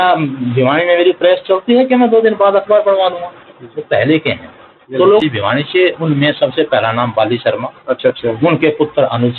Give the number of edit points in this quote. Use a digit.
1